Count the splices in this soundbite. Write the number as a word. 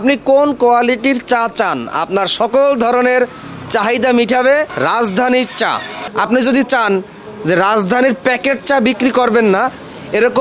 zero